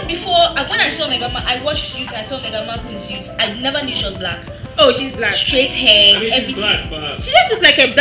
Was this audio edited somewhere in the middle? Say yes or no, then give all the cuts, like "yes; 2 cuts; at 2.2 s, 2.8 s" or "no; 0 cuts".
no; 0 cuts